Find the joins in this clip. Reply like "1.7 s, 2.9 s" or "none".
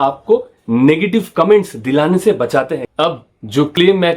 2.8 s